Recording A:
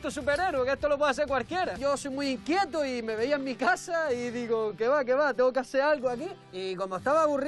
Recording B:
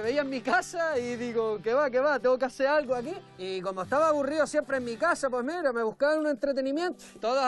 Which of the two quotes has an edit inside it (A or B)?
A